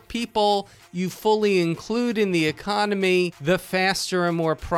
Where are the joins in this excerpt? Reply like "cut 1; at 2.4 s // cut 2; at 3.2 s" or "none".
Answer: cut 1; at 3.4 s